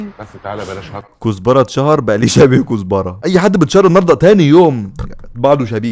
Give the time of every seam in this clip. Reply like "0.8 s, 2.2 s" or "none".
none

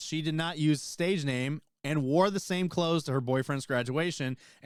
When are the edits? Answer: none

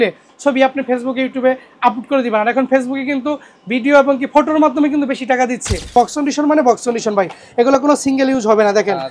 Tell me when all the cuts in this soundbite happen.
5.9 s

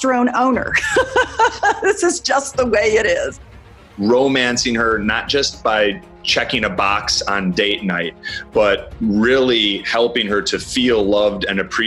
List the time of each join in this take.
3.5 s

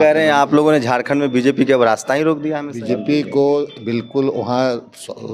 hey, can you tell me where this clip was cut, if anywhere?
2.7 s

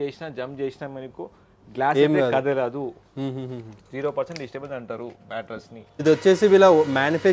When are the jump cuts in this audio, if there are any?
6.0 s

